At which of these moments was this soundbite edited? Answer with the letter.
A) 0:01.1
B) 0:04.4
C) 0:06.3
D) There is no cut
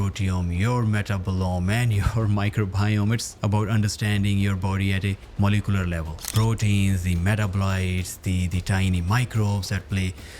C